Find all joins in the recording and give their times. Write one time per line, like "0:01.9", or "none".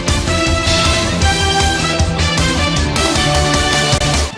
0:01.1